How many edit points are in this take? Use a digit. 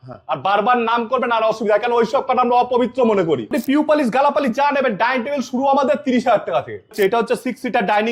2